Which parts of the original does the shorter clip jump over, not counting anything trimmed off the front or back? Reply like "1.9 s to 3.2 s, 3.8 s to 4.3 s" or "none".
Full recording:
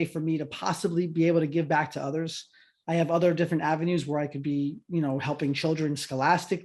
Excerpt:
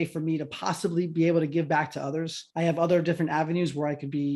2.4 s to 2.7 s